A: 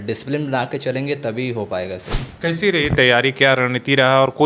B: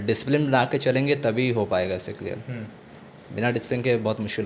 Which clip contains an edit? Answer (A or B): A